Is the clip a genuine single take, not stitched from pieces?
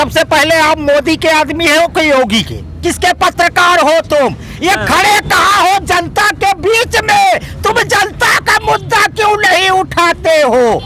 yes; 0 cuts

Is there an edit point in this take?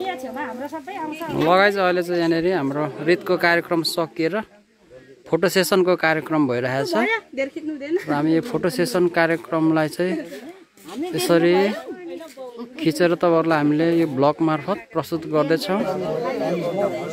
no; 0 cuts

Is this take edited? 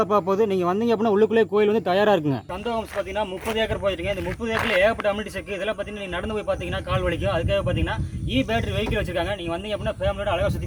no; 0 cuts

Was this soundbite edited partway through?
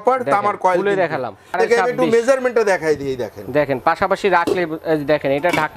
yes; 1 cut; at 1.5 s

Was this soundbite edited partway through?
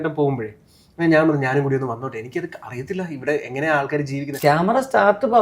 yes; 1 cut; at 4.2 s

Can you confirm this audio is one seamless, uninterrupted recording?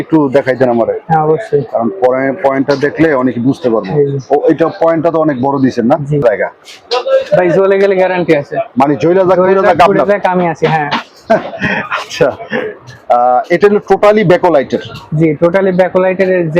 no; 1 cut; at 6.2 s

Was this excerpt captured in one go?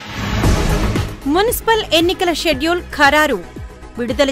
no; 1 cut; at 1.0 s

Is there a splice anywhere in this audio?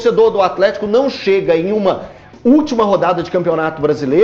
no; 0 cuts

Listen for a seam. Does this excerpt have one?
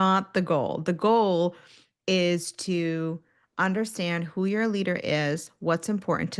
no; 0 cuts

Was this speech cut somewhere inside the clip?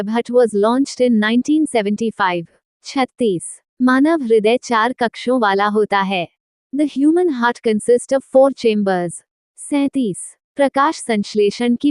no; 0 cuts

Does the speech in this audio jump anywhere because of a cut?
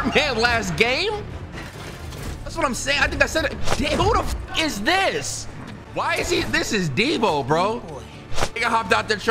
yes; 1 cut; at 5.8 s

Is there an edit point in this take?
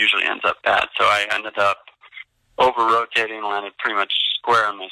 no; 0 cuts

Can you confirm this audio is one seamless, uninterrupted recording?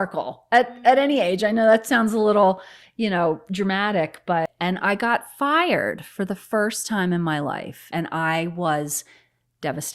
no; 2 cuts; at 4.5 s, 7.9 s

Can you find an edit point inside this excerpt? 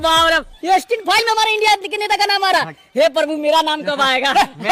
no; 0 cuts

